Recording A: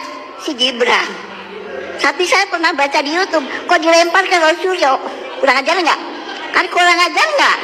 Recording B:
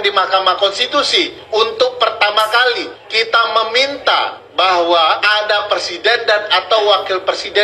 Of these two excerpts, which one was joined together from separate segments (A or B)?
B